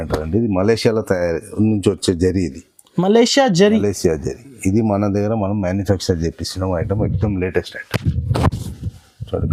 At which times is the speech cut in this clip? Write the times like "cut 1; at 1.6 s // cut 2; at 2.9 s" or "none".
none